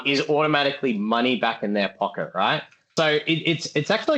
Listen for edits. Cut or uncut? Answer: cut